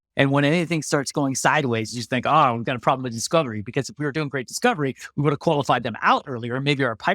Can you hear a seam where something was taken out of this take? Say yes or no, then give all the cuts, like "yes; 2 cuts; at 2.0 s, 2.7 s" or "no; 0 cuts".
no; 0 cuts